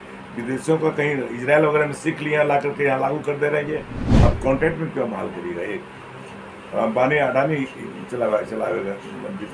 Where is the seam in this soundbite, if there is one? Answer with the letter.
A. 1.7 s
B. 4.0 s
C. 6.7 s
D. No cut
B